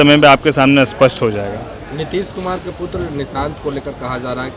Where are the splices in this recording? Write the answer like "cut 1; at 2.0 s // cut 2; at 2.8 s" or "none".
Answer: none